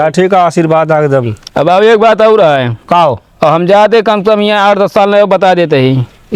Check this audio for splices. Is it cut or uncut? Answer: uncut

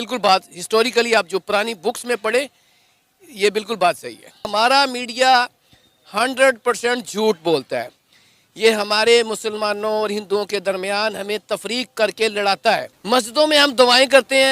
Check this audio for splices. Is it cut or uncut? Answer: cut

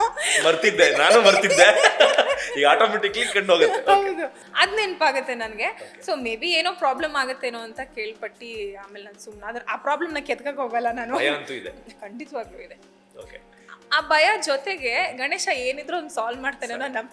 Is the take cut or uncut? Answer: cut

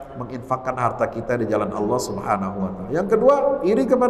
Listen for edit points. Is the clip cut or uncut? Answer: uncut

